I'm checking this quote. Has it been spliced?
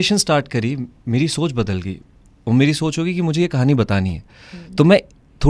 no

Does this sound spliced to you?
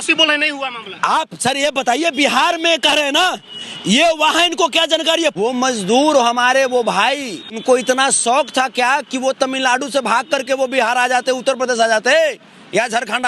yes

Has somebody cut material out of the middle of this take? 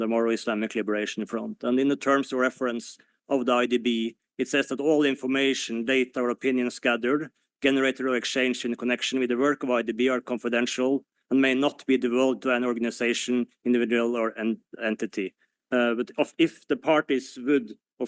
no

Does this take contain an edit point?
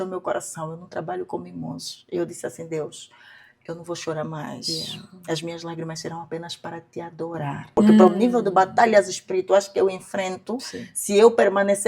yes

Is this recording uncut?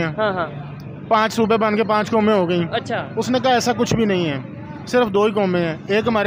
yes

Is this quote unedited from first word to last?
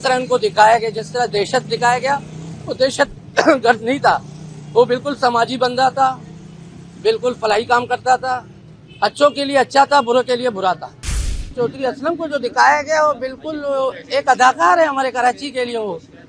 no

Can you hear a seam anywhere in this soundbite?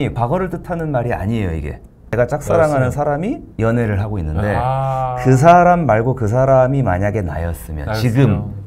yes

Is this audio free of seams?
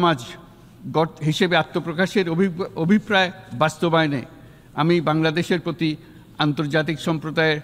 yes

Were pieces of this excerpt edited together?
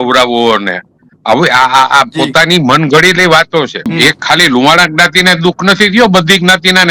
yes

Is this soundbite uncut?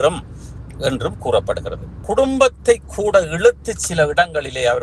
no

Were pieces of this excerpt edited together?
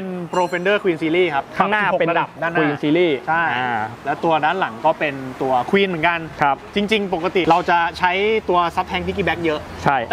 no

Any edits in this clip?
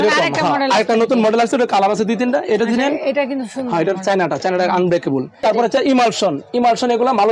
yes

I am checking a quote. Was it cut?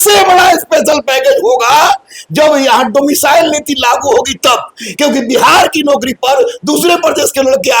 no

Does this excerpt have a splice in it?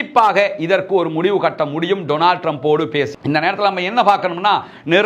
yes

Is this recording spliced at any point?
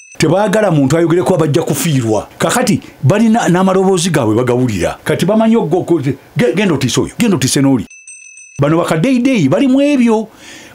yes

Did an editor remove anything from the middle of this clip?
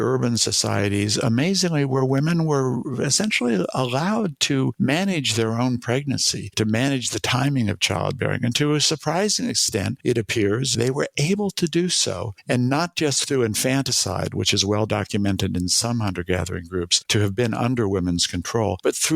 yes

